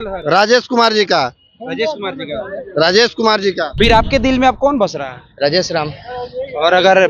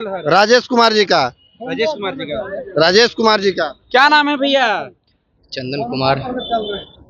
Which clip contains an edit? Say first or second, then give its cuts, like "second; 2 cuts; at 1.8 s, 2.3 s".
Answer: first; 1 cut; at 3.8 s